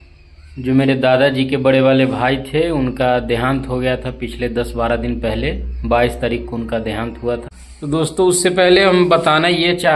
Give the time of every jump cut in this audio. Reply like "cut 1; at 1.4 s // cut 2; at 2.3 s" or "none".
cut 1; at 7.5 s